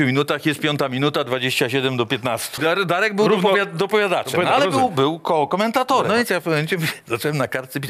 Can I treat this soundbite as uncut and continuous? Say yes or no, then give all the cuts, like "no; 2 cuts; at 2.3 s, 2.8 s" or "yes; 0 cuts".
no; 2 cuts; at 2.6 s, 6.1 s